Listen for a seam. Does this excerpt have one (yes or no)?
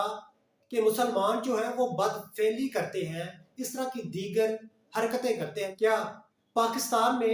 yes